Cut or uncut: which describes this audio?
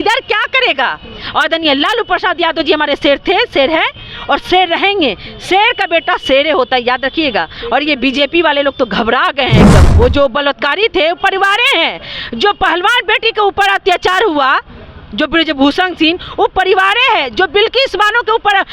cut